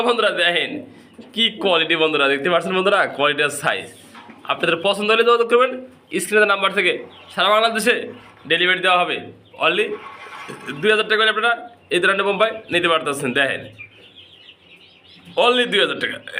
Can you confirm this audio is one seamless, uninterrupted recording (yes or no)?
yes